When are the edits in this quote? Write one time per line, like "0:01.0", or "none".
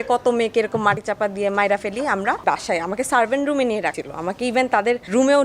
0:02.4